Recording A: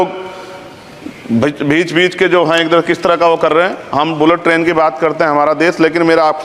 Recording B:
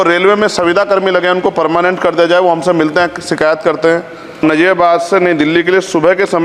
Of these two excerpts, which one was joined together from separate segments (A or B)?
B